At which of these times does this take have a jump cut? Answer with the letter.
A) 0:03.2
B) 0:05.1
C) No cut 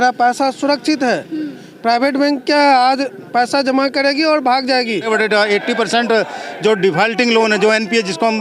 B